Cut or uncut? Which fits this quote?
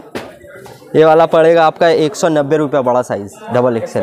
uncut